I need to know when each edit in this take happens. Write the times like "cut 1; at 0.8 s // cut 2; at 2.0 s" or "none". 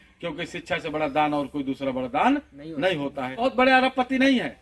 cut 1; at 3.4 s